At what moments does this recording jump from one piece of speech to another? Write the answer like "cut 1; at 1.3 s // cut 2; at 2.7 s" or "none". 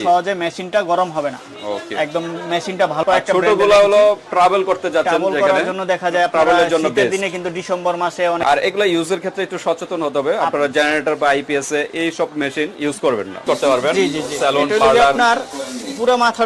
cut 1; at 3.0 s // cut 2; at 8.4 s // cut 3; at 13.4 s